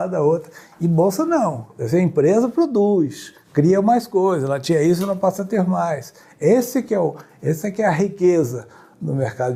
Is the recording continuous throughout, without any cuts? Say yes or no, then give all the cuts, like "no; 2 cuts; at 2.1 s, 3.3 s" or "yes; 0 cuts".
yes; 0 cuts